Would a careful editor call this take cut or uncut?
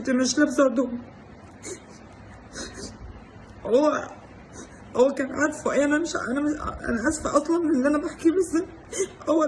uncut